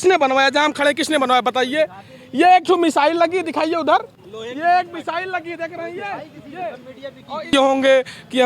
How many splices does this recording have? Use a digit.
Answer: 1